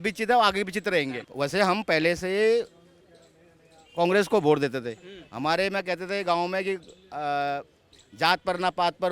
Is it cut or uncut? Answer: cut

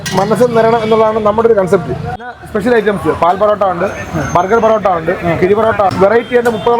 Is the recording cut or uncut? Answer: cut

